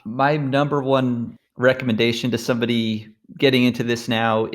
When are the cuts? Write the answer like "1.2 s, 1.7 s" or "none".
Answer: 1.3 s